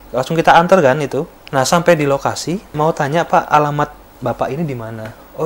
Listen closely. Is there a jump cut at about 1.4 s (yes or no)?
yes